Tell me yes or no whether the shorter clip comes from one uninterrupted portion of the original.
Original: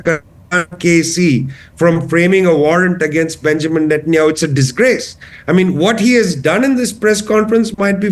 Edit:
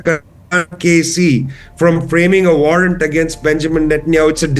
yes